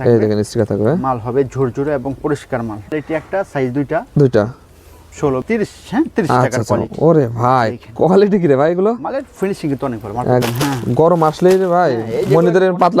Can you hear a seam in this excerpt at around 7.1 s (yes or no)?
no